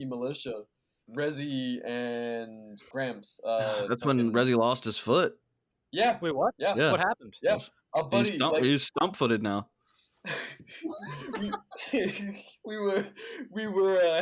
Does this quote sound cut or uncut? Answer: cut